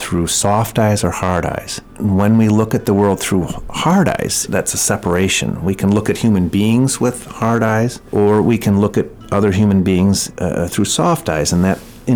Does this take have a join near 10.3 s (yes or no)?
yes